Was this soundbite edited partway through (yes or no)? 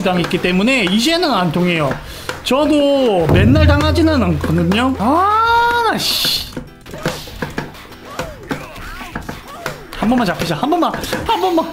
yes